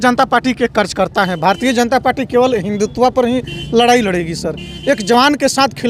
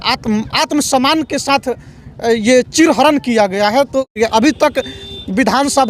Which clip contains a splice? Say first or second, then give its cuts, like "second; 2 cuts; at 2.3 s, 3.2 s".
second; 1 cut; at 4.2 s